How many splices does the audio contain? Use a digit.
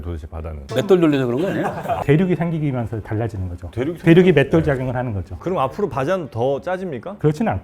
2